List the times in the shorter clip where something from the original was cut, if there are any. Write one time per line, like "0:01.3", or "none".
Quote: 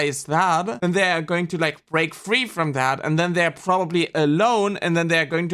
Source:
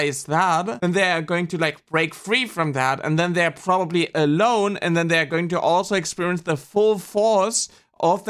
none